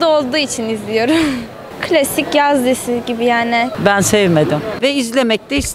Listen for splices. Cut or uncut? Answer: cut